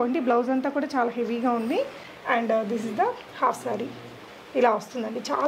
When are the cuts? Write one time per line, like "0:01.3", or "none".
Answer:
0:02.1